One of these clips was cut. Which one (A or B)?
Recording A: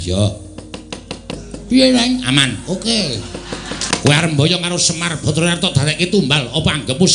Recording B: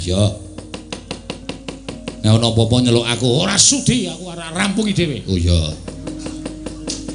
A